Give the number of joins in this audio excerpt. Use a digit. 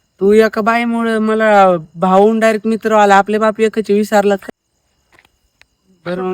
1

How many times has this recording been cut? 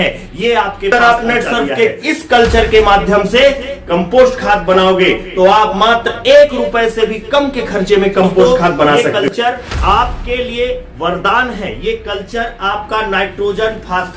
2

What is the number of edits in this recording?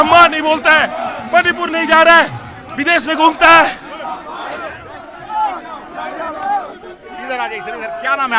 1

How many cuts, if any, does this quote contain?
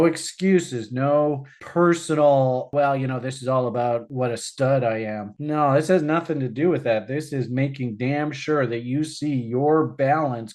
2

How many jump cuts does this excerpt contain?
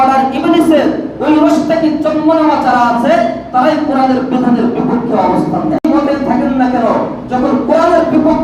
1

